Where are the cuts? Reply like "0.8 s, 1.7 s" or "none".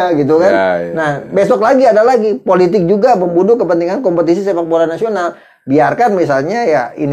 none